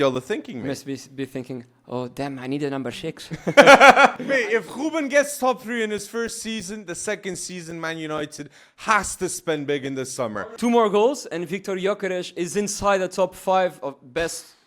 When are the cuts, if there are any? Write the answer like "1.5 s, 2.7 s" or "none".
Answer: 4.2 s, 10.3 s

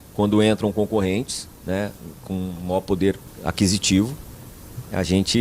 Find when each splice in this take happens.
3.3 s

